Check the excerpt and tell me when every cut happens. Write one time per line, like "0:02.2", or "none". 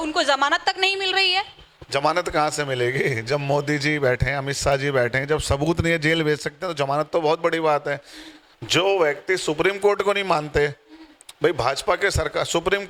none